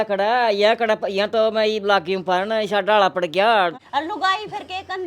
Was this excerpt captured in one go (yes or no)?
no